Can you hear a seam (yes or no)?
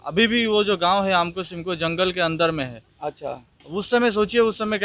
no